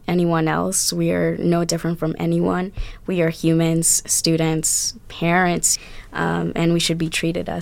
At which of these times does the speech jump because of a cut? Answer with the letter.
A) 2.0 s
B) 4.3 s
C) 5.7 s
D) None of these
C